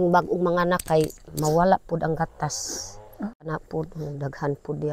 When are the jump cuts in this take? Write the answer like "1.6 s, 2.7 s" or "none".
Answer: 3.5 s